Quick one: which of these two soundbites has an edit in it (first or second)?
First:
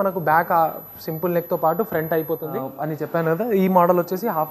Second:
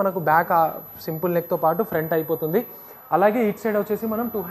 first